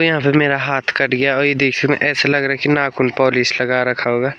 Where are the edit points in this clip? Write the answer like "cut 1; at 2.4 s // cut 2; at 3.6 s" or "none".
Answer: none